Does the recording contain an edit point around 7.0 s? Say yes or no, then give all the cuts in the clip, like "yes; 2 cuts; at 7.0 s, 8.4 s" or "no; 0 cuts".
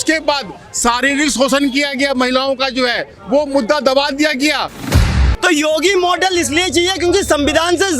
no; 1 cut; at 5.2 s